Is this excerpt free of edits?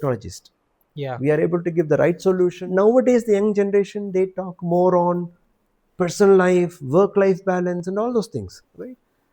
no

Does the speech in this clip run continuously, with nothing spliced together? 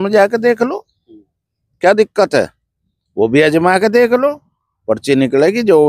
yes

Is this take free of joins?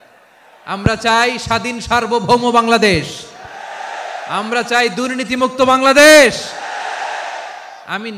yes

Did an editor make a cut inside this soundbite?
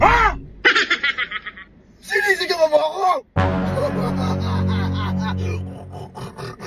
no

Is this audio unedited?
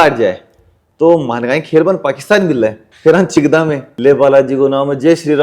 no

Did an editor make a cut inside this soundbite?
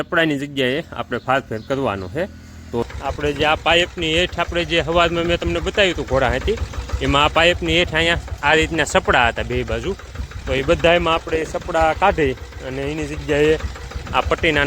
yes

